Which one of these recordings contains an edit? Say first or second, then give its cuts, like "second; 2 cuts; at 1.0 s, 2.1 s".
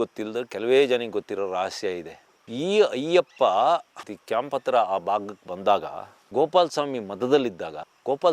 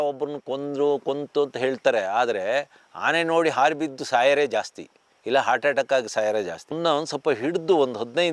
second; 1 cut; at 6.6 s